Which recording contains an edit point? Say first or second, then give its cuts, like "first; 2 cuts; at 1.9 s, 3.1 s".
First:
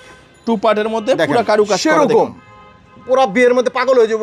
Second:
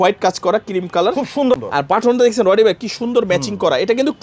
second; 1 cut; at 1.4 s